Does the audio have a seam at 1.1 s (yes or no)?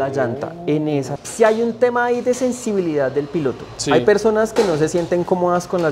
yes